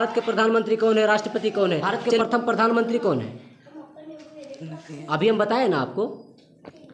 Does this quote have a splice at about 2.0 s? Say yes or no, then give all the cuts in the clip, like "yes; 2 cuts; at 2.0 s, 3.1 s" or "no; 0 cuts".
yes; 1 cut; at 2.0 s